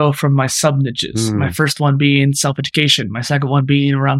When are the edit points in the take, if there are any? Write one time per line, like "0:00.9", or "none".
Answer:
none